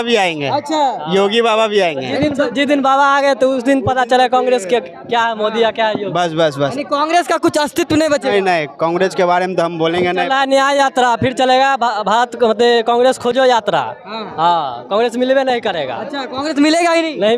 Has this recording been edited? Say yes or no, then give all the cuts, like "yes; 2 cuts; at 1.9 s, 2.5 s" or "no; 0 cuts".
no; 0 cuts